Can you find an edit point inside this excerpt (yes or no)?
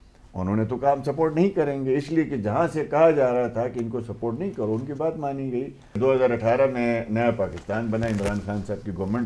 yes